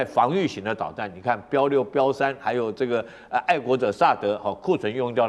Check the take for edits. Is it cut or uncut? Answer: uncut